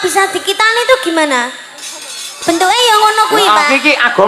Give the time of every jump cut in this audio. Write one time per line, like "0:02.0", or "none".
0:02.3